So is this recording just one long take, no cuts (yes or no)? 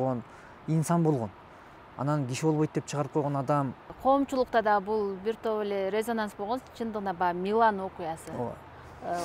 no